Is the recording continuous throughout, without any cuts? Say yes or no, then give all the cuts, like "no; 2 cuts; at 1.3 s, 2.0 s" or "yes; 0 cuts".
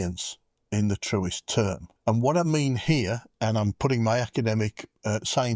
yes; 0 cuts